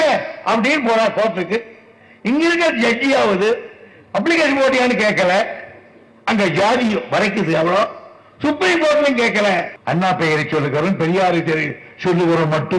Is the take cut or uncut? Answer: cut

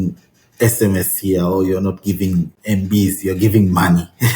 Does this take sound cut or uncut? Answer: cut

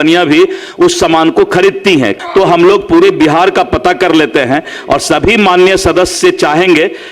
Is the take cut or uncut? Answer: cut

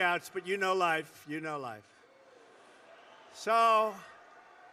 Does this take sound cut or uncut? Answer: uncut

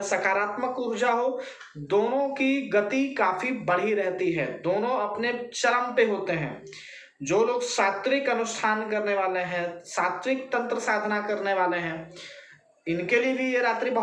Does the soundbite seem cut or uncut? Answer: uncut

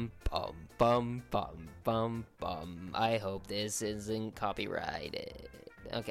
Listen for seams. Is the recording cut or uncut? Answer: uncut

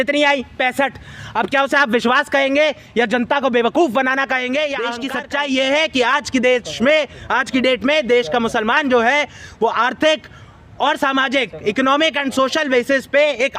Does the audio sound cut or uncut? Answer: cut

